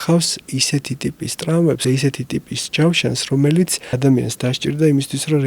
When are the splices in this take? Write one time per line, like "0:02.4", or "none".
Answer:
0:01.8
0:03.8